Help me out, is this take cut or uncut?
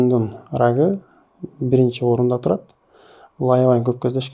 uncut